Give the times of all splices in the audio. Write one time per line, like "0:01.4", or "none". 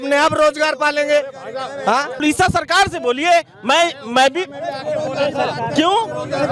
0:02.2